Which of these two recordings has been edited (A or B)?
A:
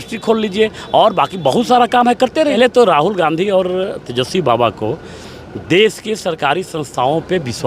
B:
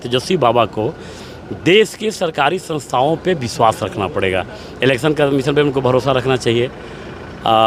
A